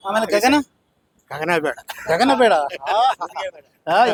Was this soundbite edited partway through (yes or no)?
no